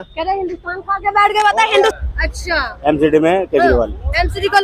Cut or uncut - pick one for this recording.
cut